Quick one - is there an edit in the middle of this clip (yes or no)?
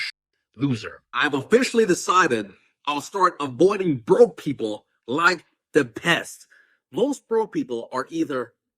yes